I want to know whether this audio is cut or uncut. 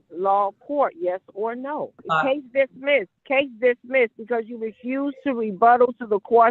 cut